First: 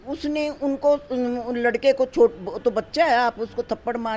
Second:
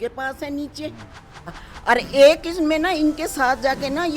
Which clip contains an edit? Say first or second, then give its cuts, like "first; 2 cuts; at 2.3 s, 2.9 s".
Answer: second; 1 cut; at 1.6 s